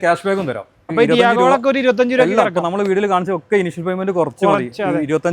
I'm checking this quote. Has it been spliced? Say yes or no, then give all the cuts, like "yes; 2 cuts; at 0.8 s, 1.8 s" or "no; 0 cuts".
yes; 1 cut; at 0.9 s